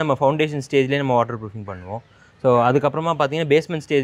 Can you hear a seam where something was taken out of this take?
no; 0 cuts

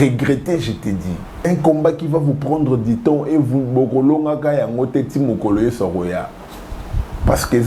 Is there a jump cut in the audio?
yes; 1 cut; at 1.4 s

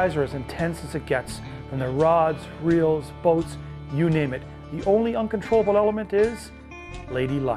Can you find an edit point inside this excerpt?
no; 0 cuts

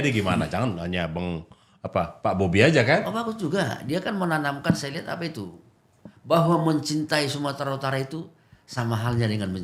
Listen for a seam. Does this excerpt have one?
no; 0 cuts

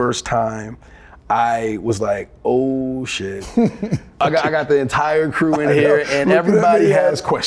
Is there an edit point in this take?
yes; 1 cut; at 4.2 s

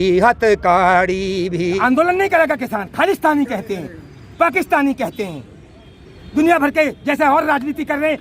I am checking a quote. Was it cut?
yes; 1 cut; at 1.7 s

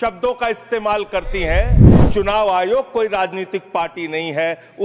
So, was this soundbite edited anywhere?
yes; 1 cut; at 2.0 s

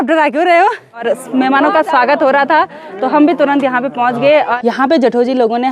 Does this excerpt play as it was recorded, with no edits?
no; 2 cuts; at 1.0 s, 4.5 s

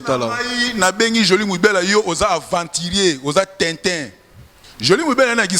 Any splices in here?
no; 0 cuts

